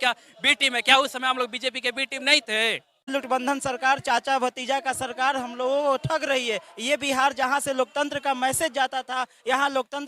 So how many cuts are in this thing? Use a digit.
1